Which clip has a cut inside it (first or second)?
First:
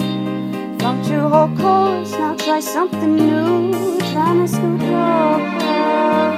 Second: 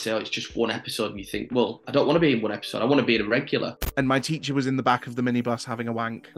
second